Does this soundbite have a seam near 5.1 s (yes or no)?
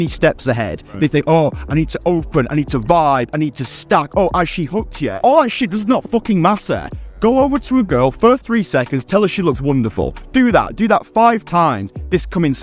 yes